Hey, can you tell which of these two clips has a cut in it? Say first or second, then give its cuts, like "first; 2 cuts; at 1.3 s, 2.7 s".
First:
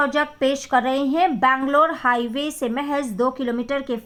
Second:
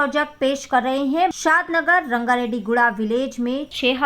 second; 1 cut; at 1.3 s